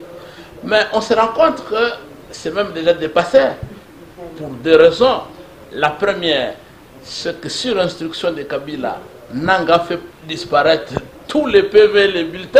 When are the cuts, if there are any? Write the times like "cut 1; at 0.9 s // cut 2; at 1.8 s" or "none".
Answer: none